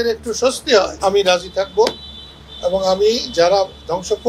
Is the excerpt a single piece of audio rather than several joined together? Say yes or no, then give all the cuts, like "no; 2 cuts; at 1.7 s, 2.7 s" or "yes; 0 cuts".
no; 1 cut; at 0.9 s